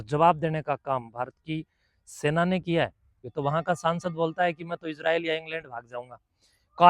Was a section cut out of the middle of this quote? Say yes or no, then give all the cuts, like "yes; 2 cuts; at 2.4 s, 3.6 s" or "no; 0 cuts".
yes; 1 cut; at 3.2 s